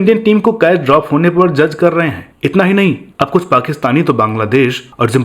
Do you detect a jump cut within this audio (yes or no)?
yes